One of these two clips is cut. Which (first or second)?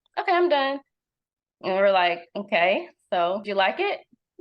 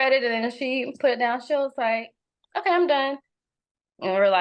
first